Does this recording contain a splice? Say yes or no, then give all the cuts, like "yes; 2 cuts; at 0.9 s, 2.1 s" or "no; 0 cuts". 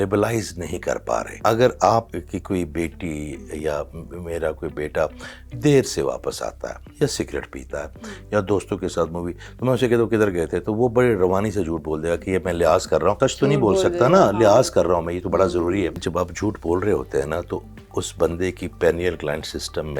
yes; 4 cuts; at 1.3 s, 2.2 s, 13.2 s, 16.0 s